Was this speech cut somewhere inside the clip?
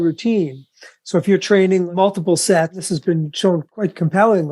yes; 3 cuts; at 1.9 s, 2.8 s, 3.7 s

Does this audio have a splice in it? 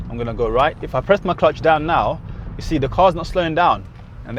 no; 0 cuts

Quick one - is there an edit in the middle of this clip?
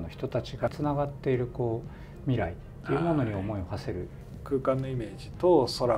yes; 2 cuts; at 0.7 s, 4.1 s

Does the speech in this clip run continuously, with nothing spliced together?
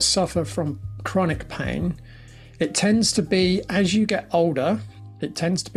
yes; 0 cuts

